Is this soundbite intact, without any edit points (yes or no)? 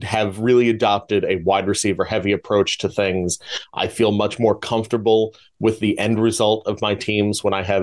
yes